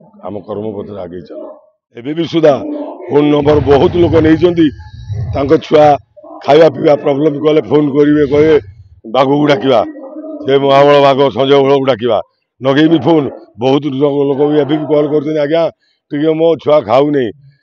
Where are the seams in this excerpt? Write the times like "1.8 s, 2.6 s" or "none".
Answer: 2.2 s